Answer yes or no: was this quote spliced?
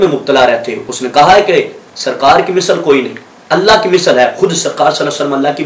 no